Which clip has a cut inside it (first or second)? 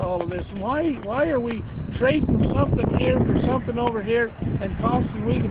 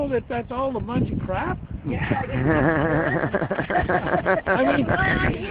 first